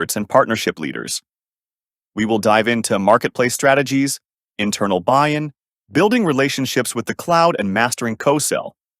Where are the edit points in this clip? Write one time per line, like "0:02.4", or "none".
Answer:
none